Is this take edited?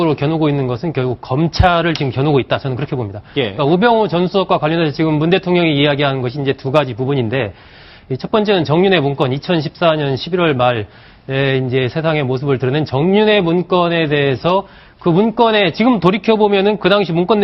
yes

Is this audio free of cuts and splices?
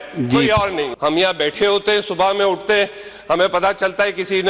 no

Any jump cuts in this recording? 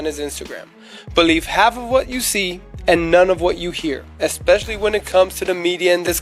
no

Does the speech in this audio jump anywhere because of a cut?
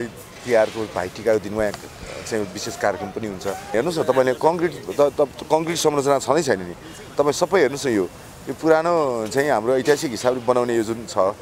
yes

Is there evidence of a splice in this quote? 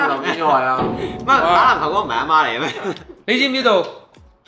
no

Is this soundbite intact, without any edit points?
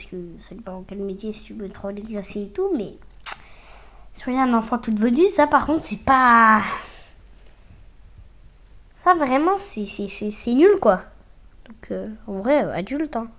yes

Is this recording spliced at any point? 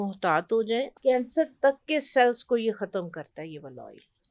yes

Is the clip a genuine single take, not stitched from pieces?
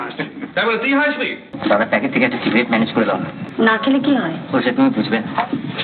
no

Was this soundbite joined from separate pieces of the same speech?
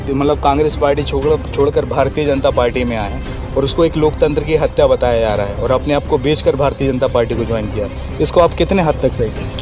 no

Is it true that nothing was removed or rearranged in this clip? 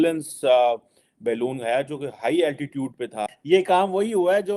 no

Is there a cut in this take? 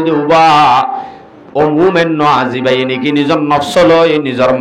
no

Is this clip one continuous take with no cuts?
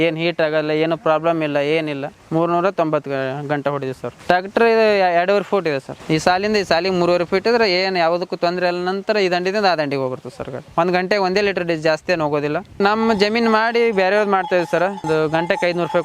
no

